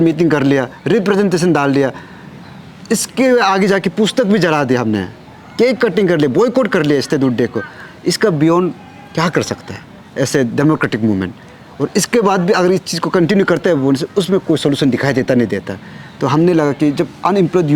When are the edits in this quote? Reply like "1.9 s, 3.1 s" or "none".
none